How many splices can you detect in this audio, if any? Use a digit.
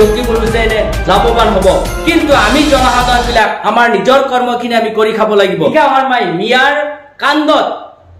1